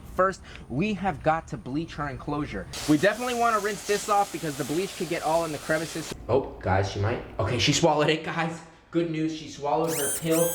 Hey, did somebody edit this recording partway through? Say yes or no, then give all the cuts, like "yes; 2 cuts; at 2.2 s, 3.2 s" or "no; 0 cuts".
yes; 2 cuts; at 2.7 s, 6.0 s